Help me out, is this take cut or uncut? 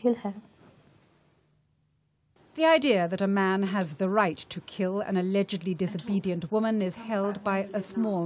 cut